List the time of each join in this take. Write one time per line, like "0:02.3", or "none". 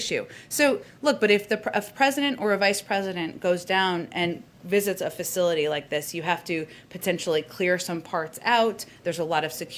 none

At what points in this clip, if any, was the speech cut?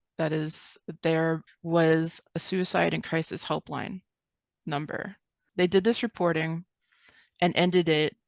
0:01.4
0:05.4

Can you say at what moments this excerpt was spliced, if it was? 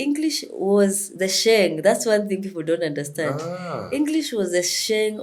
none

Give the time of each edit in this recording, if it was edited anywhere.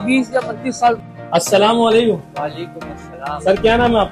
0:01.0

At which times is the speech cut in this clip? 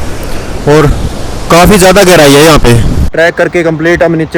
0:03.0

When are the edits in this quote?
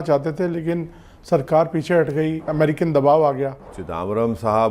0:02.5
0:03.8

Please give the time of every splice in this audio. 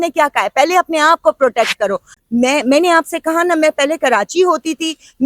0:02.1

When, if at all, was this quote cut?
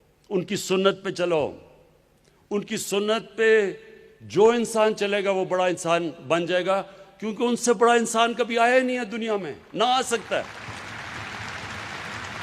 none

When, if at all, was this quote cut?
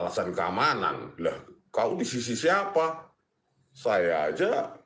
none

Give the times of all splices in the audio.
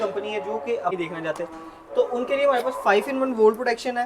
0:00.9

